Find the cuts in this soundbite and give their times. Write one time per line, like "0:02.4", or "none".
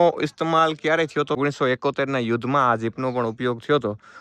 0:01.4